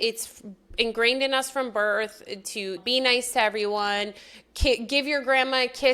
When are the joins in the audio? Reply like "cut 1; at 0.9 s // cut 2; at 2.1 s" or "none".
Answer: none